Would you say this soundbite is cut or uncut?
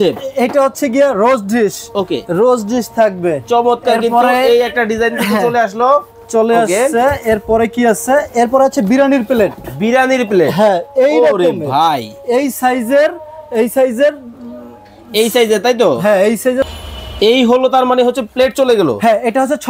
uncut